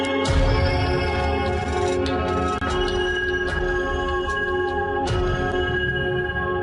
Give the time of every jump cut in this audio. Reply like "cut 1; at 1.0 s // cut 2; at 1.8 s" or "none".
cut 1; at 4.9 s